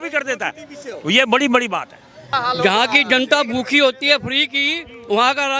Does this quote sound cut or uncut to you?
cut